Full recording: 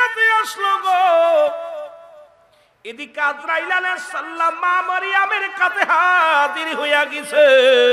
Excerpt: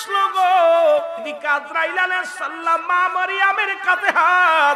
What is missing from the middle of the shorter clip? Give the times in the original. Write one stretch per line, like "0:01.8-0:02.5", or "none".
0:01.9-0:03.1